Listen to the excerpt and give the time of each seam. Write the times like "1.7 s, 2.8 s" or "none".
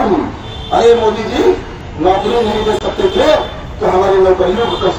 none

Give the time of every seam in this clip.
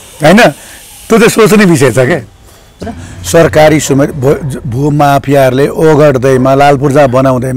2.7 s

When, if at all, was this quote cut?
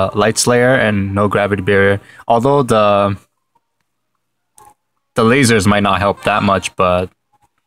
5.1 s

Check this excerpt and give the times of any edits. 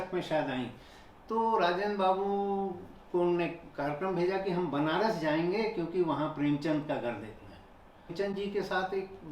8.1 s

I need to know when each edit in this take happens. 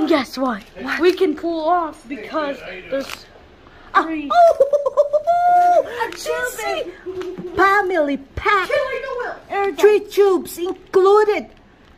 none

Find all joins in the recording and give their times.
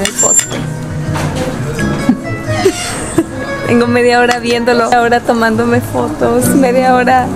none

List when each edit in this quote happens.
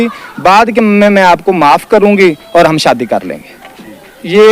none

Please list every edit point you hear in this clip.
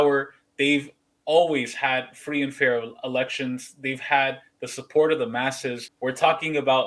5.8 s

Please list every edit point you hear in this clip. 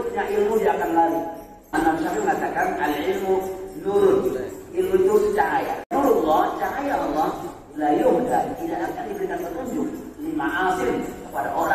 1.7 s, 5.8 s

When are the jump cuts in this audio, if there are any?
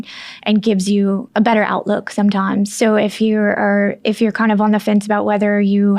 1.3 s, 2.7 s

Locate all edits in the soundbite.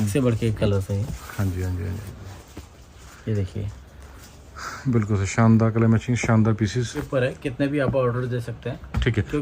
7.0 s

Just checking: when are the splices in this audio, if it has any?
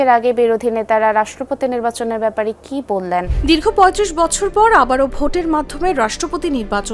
3.3 s

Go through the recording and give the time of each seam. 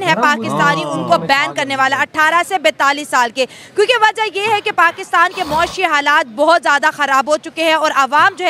none

